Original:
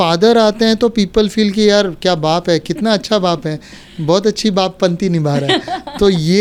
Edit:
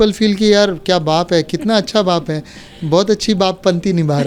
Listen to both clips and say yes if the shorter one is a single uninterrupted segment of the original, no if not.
yes